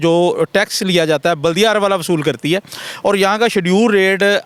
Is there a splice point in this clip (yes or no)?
no